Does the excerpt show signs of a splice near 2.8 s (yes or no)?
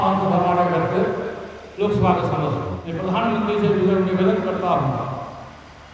yes